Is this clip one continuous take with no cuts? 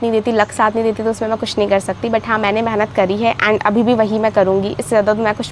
yes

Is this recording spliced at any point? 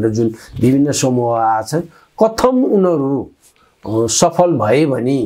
no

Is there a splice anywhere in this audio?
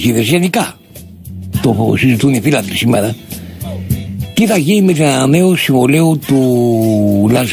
yes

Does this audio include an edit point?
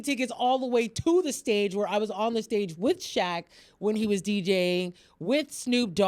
no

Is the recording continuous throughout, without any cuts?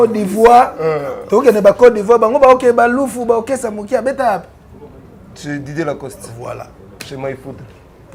yes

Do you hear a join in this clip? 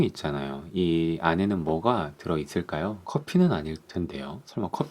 yes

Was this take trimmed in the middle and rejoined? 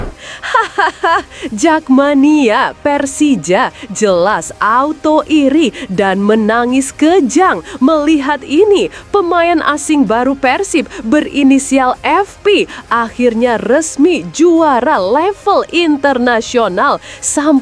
no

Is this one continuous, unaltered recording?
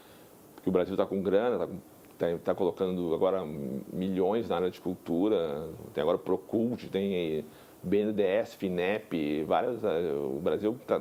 yes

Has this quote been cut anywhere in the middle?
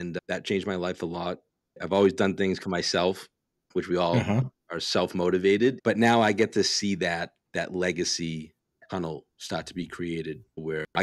yes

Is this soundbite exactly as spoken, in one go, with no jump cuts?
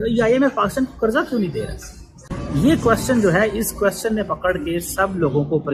yes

